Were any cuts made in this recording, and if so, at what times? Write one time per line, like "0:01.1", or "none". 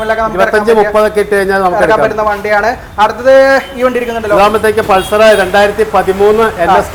none

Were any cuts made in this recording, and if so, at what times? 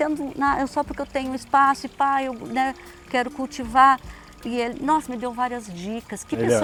none

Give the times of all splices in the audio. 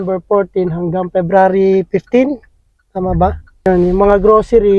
none

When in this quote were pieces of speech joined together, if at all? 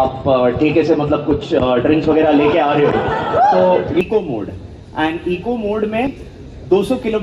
0:04.0
0:06.2

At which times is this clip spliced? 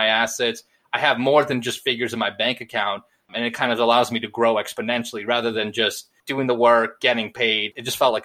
0:06.2

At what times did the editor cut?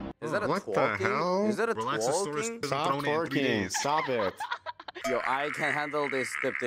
0:04.9

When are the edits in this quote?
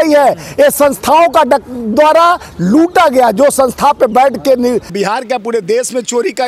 0:04.9

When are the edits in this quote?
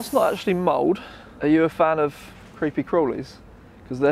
0:01.2

